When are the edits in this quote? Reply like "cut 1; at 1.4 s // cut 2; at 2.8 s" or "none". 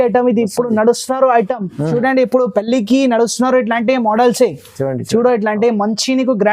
cut 1; at 1.9 s